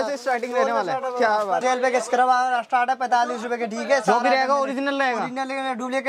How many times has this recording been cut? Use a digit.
1